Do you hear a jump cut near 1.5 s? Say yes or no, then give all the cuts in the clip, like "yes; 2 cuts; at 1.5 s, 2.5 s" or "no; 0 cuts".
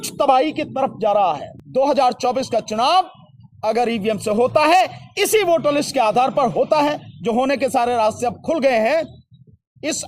yes; 1 cut; at 1.5 s